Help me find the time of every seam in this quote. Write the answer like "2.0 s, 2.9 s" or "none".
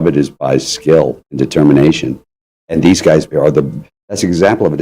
1.2 s, 3.3 s